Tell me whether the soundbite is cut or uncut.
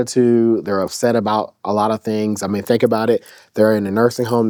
uncut